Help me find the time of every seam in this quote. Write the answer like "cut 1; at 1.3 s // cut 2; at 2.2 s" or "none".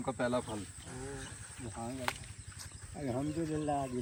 none